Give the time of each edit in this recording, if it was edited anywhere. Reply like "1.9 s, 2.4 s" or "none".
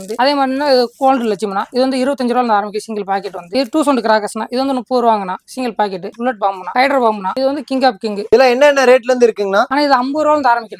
none